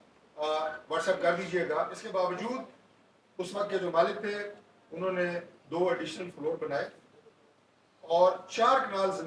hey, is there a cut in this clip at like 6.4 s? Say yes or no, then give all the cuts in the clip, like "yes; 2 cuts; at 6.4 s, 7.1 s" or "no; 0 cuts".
no; 1 cut; at 2.0 s